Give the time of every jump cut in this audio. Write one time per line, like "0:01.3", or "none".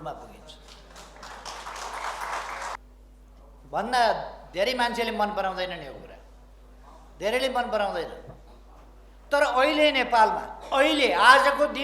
0:02.8